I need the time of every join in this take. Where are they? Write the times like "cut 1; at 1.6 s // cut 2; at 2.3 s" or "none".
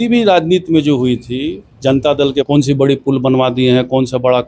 cut 1; at 2.5 s